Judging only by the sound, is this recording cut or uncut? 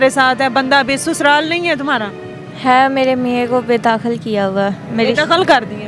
uncut